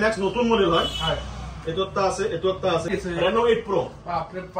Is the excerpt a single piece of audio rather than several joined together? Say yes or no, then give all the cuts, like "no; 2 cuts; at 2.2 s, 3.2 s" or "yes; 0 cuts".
no; 1 cut; at 2.9 s